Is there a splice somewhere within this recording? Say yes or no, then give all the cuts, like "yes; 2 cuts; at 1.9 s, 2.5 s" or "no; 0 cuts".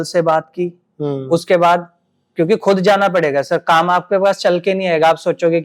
no; 0 cuts